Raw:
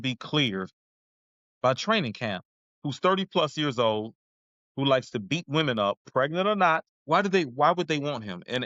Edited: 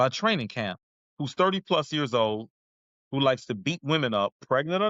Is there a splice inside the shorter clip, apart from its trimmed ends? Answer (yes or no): no